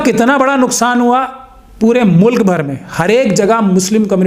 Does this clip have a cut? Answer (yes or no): no